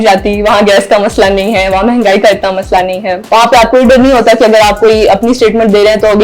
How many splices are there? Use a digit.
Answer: 1